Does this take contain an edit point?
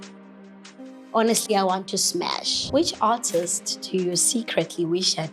yes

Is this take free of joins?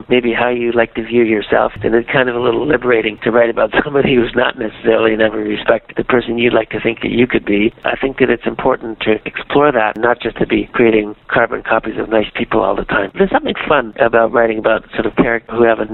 no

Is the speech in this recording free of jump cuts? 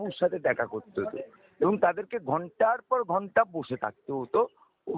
yes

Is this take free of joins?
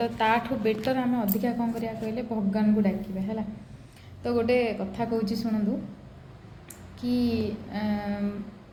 yes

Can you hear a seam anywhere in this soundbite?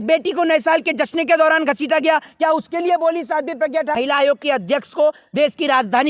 yes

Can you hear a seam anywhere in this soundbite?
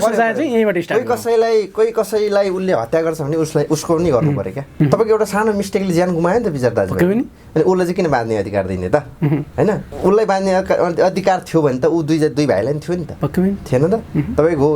yes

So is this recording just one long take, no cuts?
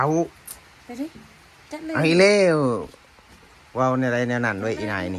yes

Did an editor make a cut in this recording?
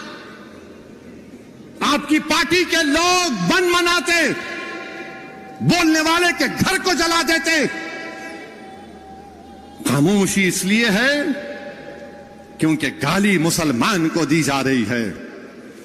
no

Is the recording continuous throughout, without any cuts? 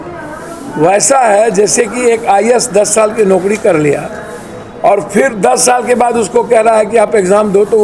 yes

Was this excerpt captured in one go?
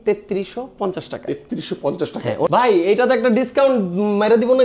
no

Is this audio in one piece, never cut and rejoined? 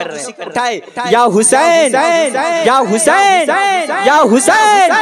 yes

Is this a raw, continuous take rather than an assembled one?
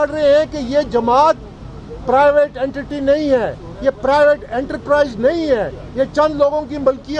yes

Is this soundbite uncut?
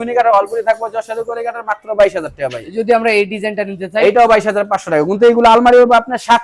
yes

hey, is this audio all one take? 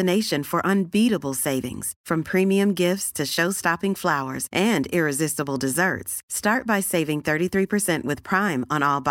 yes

